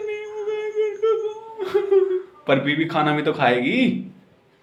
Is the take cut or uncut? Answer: uncut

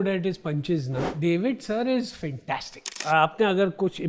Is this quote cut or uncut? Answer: cut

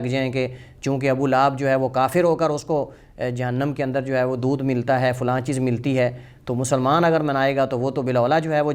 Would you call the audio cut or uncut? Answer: uncut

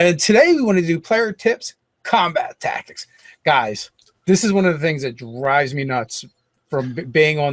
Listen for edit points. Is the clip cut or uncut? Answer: cut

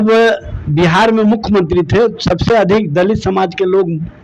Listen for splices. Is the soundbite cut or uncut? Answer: uncut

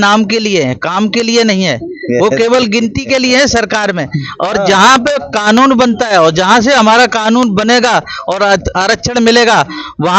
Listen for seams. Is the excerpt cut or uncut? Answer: uncut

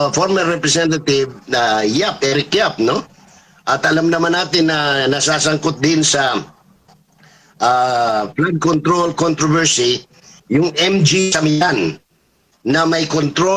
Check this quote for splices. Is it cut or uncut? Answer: uncut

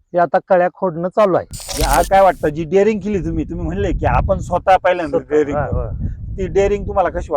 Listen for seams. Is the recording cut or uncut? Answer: cut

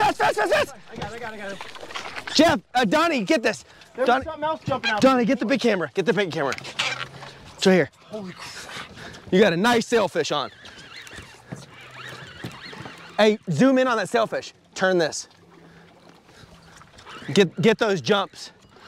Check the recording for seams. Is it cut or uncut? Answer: uncut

